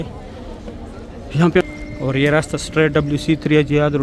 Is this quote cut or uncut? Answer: cut